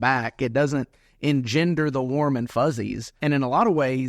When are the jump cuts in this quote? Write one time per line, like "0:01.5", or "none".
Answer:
0:03.1